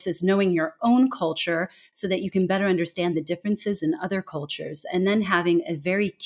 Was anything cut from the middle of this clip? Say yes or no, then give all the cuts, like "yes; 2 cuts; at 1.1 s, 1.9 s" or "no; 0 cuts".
no; 0 cuts